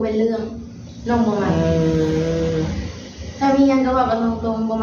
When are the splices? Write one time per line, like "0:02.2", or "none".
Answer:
none